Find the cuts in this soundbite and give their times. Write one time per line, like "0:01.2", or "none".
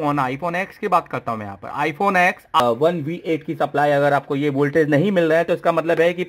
0:02.6